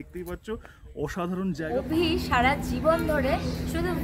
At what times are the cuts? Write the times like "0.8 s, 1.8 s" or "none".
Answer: 1.7 s